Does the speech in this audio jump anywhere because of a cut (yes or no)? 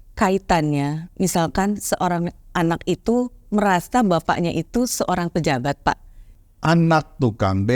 yes